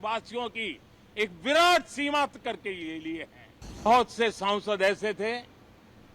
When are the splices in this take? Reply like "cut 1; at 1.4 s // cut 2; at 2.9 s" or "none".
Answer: cut 1; at 3.9 s